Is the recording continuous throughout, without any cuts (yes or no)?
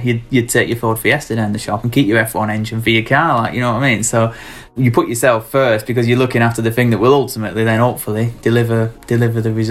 yes